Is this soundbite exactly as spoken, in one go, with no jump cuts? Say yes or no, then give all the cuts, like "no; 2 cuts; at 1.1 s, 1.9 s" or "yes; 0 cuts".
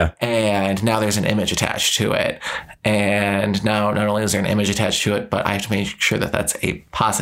yes; 0 cuts